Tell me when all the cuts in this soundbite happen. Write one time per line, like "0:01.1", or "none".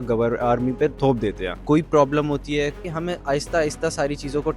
0:01.3
0:02.9